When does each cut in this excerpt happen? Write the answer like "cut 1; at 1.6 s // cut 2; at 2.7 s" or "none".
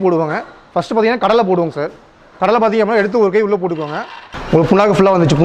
cut 1; at 4.4 s